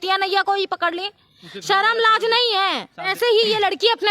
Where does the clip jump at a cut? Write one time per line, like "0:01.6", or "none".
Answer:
0:03.1